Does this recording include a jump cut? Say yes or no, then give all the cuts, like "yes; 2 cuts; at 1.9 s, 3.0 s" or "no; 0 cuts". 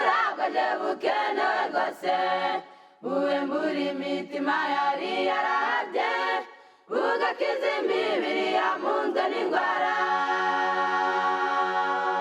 no; 0 cuts